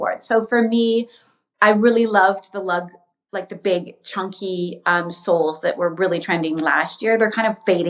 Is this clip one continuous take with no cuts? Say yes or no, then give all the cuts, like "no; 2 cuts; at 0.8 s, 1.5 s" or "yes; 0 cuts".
yes; 0 cuts